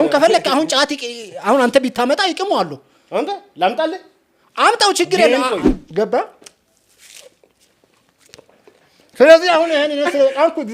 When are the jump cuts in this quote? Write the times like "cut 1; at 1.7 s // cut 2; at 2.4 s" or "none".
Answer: cut 1; at 5.7 s